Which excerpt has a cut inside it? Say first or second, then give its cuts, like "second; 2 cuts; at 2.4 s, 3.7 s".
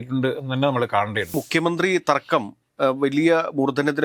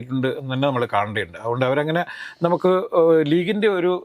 first; 1 cut; at 1.3 s